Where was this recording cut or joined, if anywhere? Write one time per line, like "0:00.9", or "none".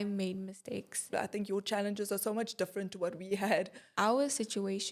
0:01.0
0:03.9